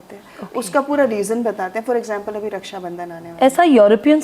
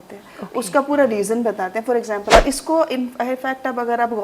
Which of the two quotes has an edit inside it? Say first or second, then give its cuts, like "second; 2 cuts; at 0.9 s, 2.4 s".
second; 1 cut; at 2.3 s